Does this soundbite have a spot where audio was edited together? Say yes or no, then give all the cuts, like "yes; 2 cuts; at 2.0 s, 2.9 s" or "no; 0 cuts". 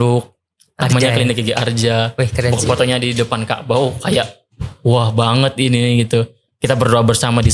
no; 0 cuts